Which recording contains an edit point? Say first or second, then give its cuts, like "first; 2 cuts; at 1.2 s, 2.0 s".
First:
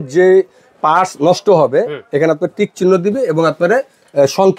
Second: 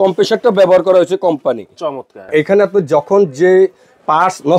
second; 1 cut; at 2.3 s